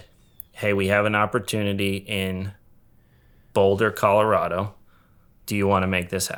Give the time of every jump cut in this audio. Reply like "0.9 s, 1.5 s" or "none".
none